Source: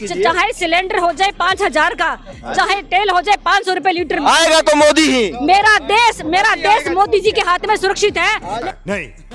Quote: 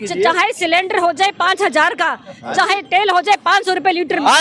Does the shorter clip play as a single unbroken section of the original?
yes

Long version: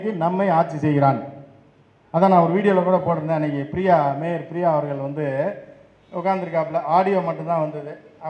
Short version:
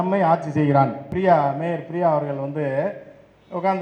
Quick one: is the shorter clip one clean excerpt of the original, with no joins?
no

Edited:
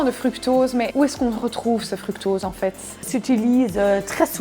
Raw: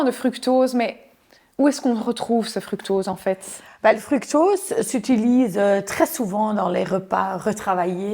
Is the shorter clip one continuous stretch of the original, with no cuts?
no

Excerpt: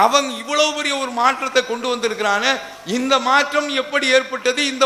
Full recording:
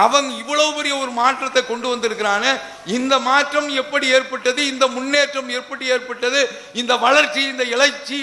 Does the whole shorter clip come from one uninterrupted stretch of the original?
yes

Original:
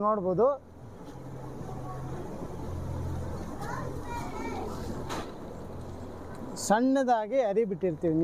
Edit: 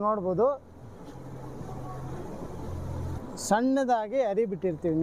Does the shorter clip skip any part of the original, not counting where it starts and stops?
yes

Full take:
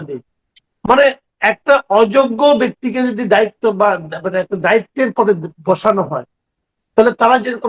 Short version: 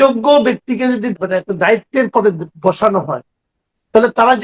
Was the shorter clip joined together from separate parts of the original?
yes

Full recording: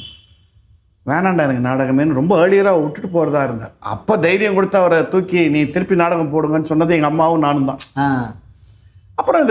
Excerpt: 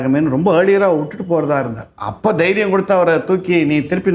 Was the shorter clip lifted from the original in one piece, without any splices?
yes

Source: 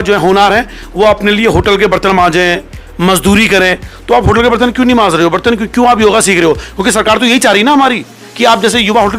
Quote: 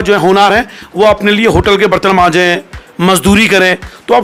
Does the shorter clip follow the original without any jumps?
yes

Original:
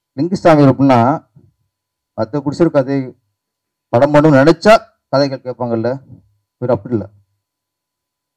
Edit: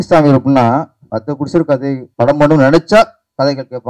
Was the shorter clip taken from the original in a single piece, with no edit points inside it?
no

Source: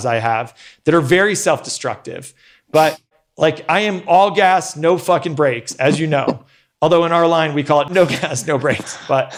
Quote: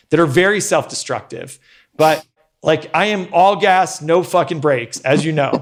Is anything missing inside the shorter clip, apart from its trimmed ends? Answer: no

